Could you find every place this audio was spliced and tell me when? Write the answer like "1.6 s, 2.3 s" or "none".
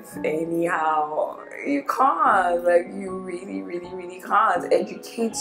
none